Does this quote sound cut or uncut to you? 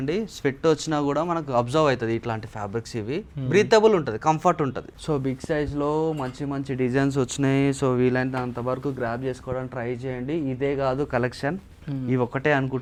uncut